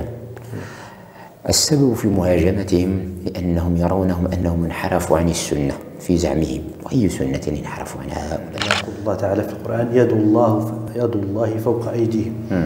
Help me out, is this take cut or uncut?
cut